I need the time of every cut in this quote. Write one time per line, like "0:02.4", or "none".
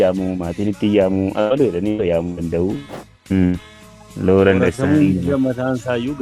0:02.9

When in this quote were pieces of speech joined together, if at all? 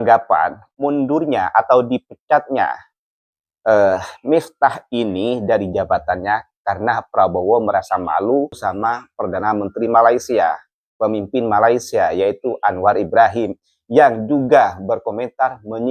none

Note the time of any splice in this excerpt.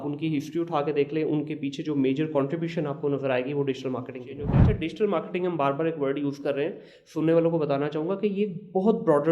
0:04.6

